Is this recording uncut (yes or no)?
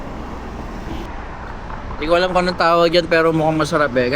no